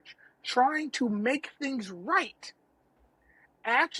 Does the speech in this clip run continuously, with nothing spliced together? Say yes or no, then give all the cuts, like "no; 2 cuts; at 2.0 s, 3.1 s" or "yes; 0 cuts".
yes; 0 cuts